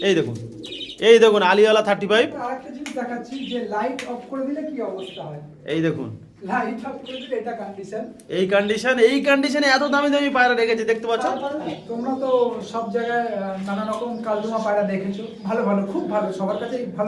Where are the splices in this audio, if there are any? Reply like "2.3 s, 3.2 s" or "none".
2.4 s, 11.7 s